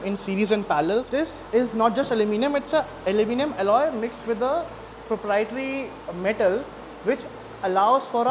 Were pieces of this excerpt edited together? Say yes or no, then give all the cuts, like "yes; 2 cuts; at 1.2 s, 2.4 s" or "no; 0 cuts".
yes; 1 cut; at 1.1 s